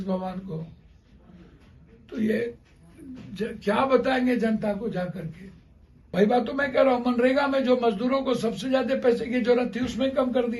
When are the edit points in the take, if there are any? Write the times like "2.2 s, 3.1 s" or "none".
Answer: 6.1 s